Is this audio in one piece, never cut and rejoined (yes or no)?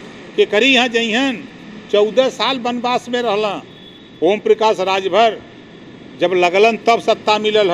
yes